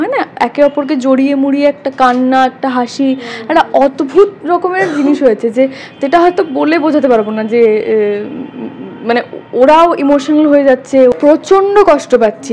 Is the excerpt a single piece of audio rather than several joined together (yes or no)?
no